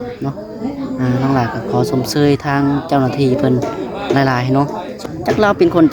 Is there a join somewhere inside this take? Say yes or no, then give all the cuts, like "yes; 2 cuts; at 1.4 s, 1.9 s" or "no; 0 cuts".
yes; 1 cut; at 5.0 s